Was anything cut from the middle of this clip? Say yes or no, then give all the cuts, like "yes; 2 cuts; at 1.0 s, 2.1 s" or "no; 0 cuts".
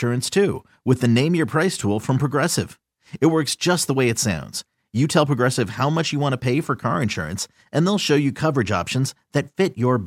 no; 0 cuts